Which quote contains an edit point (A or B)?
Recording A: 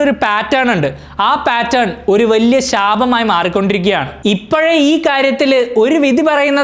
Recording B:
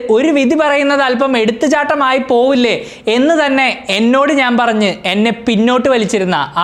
A